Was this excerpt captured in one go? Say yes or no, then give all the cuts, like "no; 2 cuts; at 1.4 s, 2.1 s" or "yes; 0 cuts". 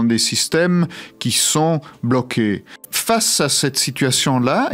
no; 1 cut; at 2.9 s